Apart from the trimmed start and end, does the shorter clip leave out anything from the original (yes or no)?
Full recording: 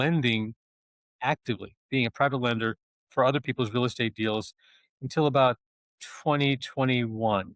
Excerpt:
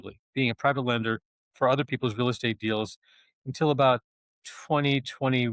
no